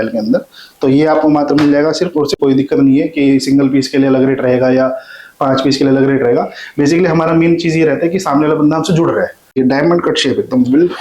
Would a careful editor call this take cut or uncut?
cut